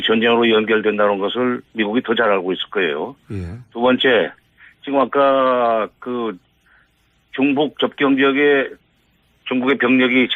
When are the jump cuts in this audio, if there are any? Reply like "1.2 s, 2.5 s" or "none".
2.7 s